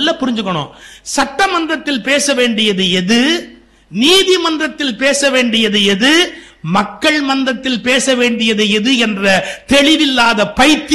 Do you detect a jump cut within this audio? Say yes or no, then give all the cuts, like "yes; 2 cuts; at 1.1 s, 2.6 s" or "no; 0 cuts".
no; 0 cuts